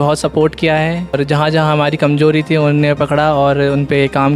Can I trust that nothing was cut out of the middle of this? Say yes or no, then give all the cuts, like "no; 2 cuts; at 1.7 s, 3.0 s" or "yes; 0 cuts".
no; 1 cut; at 1.2 s